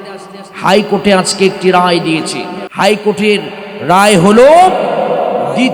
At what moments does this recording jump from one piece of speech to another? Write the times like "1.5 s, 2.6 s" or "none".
2.6 s